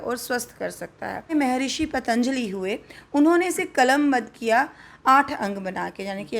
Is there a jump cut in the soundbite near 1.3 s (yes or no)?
yes